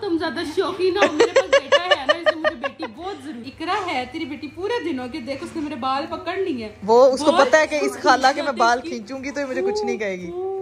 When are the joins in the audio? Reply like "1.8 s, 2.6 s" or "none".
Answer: none